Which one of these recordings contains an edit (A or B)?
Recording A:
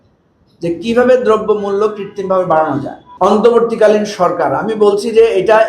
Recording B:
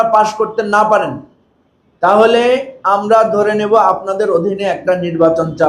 A